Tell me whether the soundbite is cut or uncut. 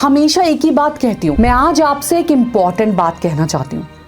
cut